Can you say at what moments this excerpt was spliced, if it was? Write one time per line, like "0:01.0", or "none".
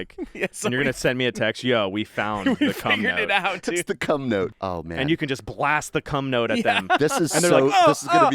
0:04.5